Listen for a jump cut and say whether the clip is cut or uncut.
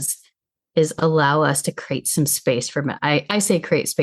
uncut